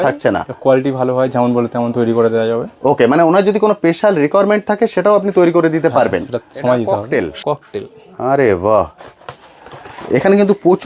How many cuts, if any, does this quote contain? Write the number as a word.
one